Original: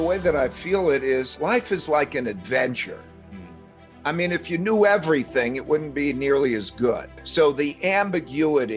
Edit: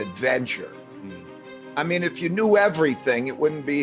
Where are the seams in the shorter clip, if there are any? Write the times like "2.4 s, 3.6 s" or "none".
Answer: none